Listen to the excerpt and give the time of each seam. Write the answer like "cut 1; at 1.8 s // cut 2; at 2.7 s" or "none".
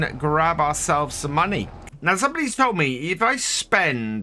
cut 1; at 1.9 s